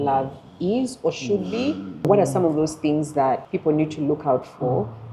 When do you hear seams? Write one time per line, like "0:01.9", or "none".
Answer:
0:02.1
0:03.5